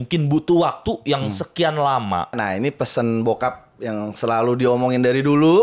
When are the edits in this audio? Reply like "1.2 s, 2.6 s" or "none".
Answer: 2.4 s